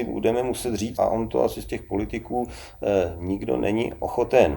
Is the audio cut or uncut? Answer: cut